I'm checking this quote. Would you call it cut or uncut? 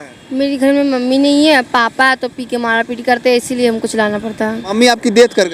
cut